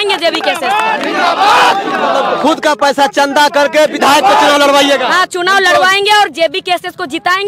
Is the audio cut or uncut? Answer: uncut